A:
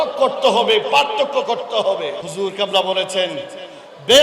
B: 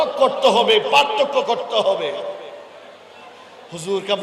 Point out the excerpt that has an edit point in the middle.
A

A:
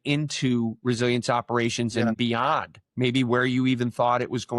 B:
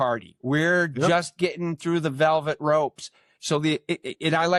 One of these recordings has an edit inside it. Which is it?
A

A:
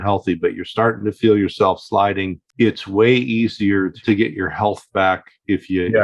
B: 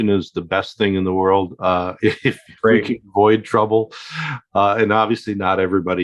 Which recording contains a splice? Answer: A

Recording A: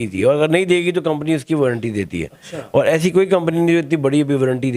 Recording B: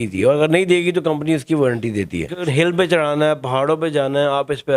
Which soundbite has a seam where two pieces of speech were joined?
B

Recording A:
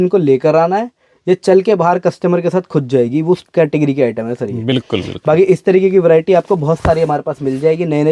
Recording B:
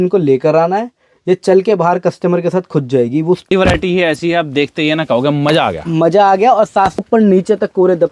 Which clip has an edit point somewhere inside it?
B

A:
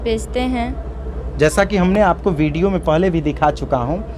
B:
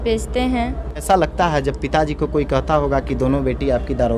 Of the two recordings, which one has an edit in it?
B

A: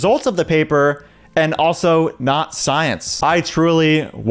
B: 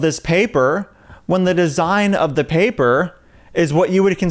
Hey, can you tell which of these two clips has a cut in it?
A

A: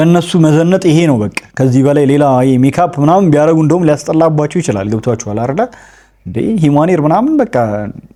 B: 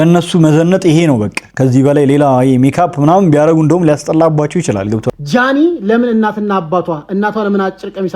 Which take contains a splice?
B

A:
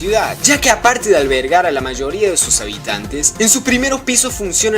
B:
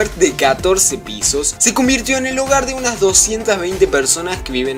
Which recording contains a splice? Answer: A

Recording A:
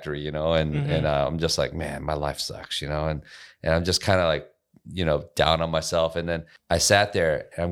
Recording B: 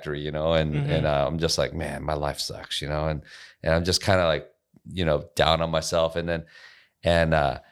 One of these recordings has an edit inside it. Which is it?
A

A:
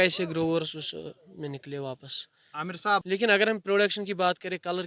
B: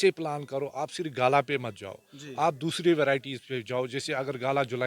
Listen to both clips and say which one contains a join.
A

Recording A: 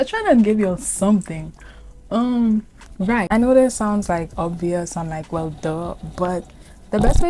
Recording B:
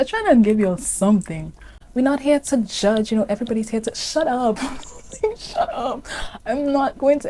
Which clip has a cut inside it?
B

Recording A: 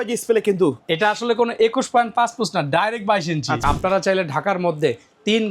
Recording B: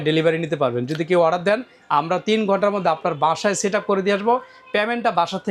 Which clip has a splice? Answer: A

